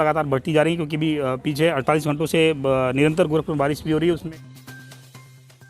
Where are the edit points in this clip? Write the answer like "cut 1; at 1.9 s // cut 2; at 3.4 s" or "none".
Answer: cut 1; at 4.2 s